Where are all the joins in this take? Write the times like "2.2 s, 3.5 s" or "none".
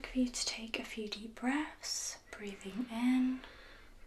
none